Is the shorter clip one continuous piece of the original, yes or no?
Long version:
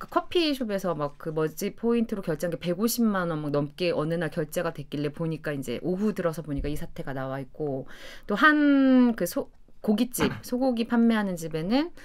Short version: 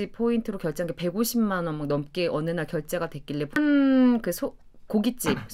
no